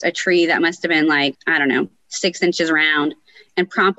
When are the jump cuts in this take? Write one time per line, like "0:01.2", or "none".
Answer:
0:01.4